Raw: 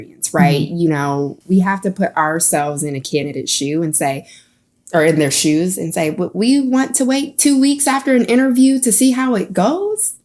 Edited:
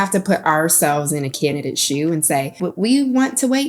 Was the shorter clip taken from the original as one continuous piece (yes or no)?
no